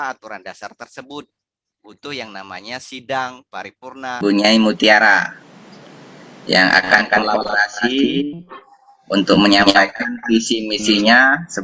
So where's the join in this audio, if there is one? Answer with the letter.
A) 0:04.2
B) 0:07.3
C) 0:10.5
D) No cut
A